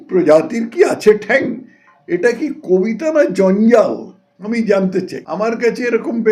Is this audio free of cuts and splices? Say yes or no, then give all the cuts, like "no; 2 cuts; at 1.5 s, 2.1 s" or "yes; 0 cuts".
no; 1 cut; at 5.2 s